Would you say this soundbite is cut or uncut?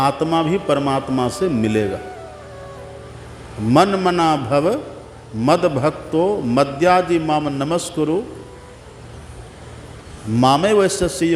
uncut